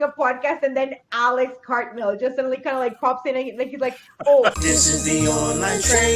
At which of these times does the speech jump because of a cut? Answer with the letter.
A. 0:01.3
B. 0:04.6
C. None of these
B